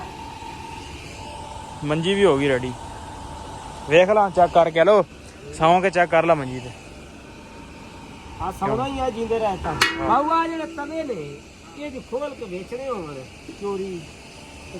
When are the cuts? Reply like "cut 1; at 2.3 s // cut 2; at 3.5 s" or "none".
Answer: cut 1; at 10.0 s